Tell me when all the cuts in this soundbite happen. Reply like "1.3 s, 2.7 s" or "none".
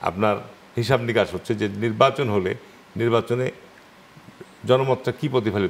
none